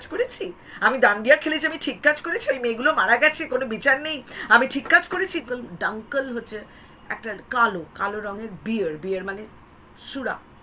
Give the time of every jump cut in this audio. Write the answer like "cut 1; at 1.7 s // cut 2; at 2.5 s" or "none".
cut 1; at 5.4 s

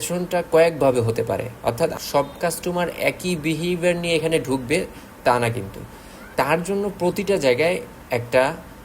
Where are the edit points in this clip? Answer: cut 1; at 1.9 s // cut 2; at 6.3 s

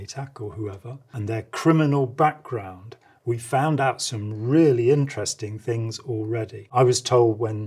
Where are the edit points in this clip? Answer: cut 1; at 1.1 s // cut 2; at 6.6 s

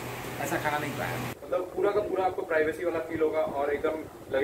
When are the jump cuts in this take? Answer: cut 1; at 1.4 s

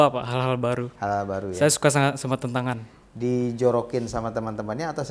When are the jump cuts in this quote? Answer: none

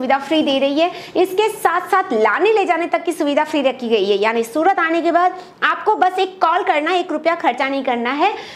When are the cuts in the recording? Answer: none

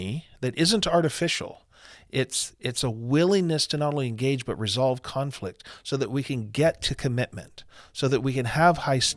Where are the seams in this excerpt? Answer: none

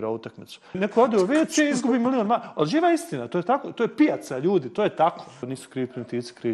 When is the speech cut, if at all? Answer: cut 1; at 0.8 s // cut 2; at 5.6 s

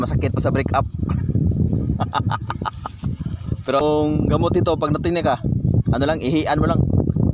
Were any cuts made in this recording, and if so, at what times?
cut 1; at 3.8 s

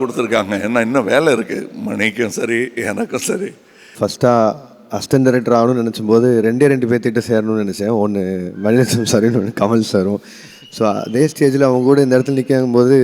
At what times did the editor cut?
cut 1; at 3.9 s

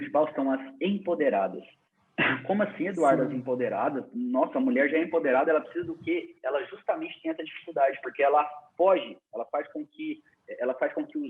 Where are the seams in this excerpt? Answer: none

